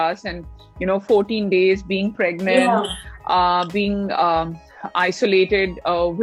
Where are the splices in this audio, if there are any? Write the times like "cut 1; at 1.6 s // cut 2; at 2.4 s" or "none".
none